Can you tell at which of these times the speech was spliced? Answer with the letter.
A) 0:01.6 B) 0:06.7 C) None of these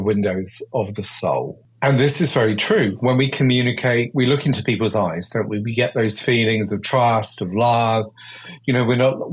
A